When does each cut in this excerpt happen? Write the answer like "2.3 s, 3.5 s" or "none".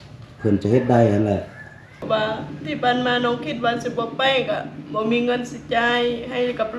2.0 s